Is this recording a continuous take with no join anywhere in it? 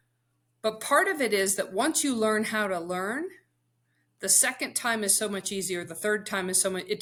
yes; 0 cuts

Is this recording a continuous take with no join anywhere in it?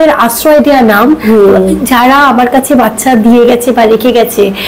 yes; 0 cuts

